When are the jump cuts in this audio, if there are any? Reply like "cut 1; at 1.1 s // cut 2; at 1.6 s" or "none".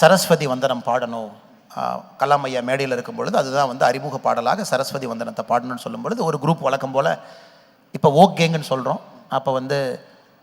none